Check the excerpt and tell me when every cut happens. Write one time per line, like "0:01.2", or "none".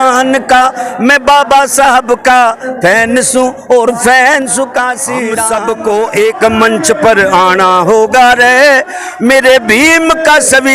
0:05.3